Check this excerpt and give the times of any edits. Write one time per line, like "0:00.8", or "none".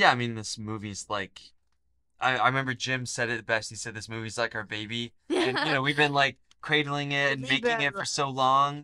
none